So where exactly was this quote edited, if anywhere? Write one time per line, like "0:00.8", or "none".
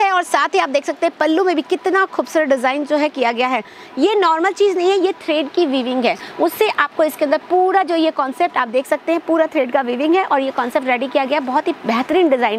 none